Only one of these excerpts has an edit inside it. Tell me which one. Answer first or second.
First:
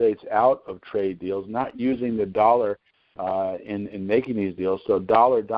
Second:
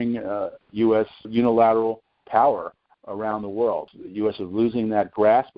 second